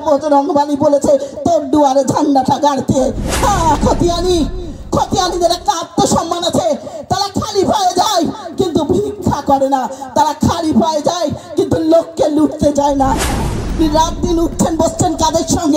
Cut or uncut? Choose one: cut